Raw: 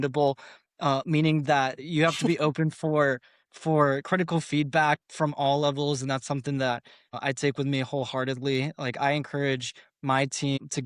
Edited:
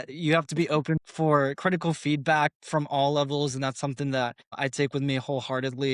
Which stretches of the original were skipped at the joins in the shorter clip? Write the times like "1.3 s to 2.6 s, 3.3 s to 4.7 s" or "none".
2.8 s to 3.5 s, 6.9 s to 7.1 s